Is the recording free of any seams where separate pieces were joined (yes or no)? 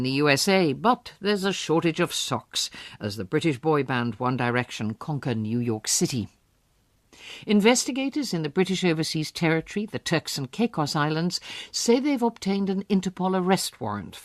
yes